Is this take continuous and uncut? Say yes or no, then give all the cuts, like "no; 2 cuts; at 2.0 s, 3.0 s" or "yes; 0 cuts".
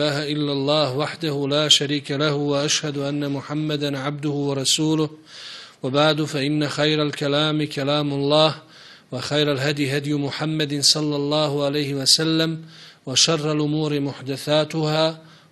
yes; 0 cuts